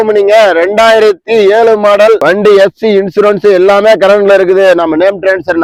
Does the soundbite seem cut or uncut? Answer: uncut